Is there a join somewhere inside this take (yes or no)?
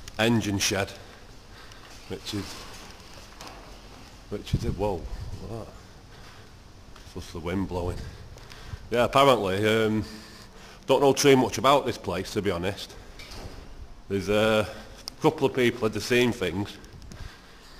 no